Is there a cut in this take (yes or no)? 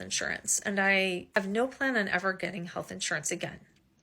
yes